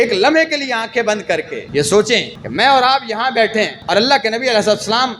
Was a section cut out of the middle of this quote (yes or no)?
yes